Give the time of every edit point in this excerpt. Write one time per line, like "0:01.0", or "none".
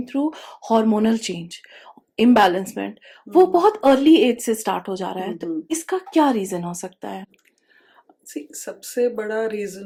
none